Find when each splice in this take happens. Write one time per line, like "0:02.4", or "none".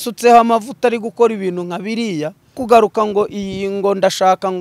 0:02.6